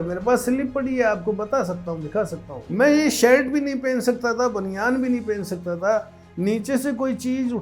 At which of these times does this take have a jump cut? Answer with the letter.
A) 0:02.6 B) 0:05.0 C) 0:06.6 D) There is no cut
A